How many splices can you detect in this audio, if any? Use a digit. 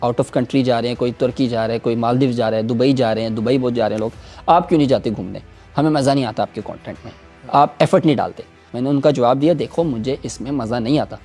0